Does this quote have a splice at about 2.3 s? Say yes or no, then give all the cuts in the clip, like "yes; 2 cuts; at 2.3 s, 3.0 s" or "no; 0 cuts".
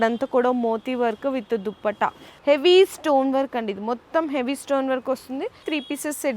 yes; 2 cuts; at 2.3 s, 5.6 s